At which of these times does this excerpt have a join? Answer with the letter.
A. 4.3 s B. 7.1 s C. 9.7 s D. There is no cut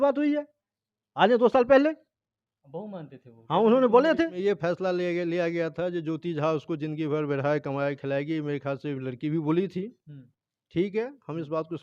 A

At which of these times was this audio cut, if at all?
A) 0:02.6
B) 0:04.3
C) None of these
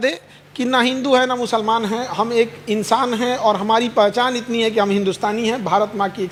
C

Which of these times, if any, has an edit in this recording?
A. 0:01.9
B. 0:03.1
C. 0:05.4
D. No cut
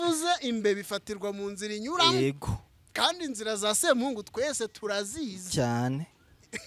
D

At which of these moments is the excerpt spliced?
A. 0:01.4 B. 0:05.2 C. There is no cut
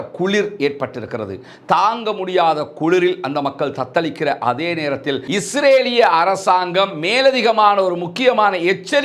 B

